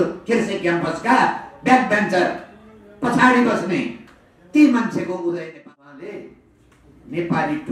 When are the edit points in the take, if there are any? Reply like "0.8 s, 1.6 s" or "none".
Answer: 5.4 s